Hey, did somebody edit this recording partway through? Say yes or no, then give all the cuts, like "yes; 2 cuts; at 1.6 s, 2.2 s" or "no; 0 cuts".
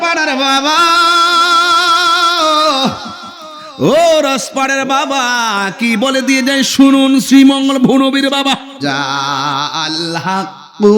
yes; 1 cut; at 8.8 s